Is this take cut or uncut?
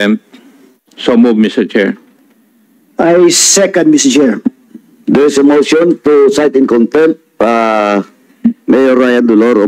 uncut